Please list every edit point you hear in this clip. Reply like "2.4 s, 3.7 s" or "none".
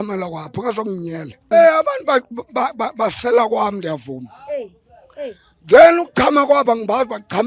1.5 s